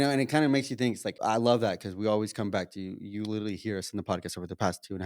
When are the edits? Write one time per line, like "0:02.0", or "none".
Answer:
0:01.1